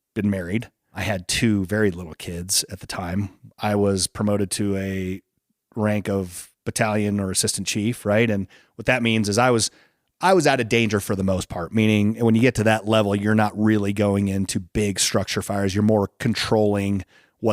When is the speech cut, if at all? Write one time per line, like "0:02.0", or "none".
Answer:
0:00.9
0:03.4